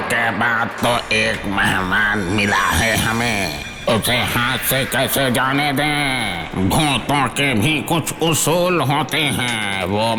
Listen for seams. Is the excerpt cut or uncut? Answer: uncut